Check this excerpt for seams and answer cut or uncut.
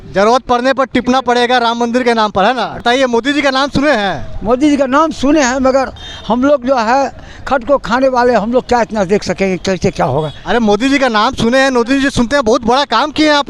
cut